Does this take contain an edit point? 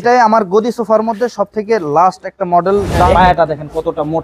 yes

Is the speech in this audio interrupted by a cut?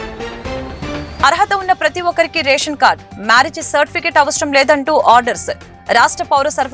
yes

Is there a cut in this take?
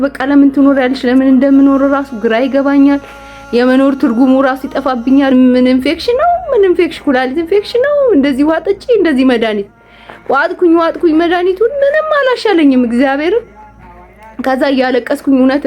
yes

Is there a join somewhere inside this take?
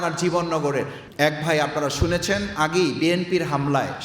yes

